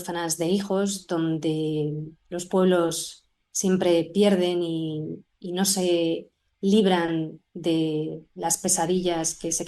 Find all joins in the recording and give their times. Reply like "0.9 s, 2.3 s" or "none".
none